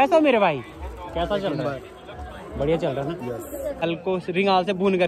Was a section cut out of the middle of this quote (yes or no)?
yes